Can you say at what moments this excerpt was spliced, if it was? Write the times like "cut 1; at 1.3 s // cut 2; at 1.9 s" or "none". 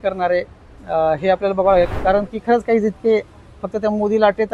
cut 1; at 1.9 s

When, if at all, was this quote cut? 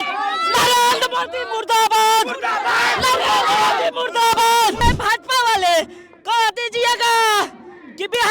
cut 1; at 4.8 s

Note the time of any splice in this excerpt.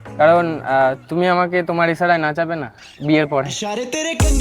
cut 1; at 3.5 s

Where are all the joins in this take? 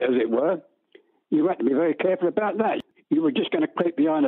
cut 1; at 2.8 s

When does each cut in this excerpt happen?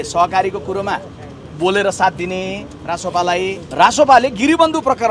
cut 1; at 3.6 s

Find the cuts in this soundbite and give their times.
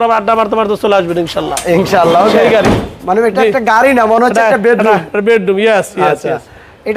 none

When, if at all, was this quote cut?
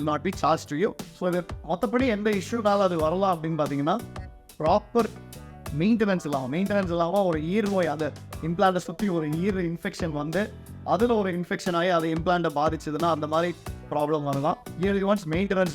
cut 1; at 1.1 s // cut 2; at 14.7 s

